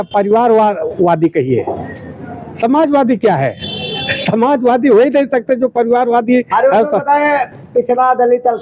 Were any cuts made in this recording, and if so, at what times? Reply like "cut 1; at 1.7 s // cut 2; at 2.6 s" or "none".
none